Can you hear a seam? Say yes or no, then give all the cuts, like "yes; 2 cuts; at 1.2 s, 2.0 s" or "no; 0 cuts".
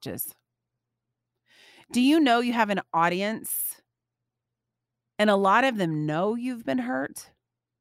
no; 0 cuts